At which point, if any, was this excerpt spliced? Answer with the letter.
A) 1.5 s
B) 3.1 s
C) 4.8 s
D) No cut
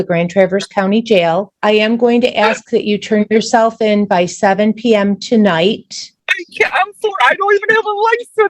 A